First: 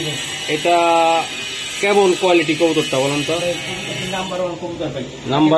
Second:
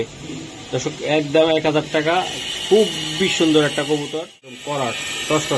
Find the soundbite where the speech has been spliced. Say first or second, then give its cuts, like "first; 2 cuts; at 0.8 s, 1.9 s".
second; 1 cut; at 4.6 s